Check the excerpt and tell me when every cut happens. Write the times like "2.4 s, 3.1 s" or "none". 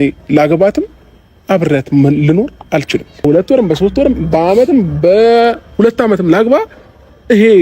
3.2 s